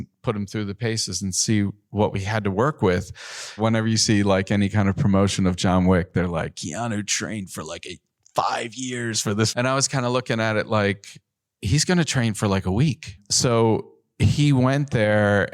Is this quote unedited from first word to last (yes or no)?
no